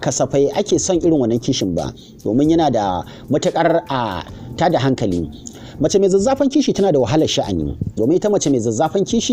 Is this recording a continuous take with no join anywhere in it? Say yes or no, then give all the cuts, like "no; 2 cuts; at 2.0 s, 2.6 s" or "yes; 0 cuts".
yes; 0 cuts